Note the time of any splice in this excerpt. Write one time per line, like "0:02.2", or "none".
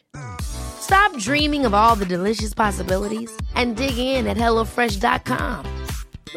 none